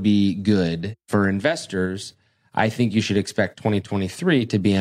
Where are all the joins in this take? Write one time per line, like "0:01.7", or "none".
0:01.0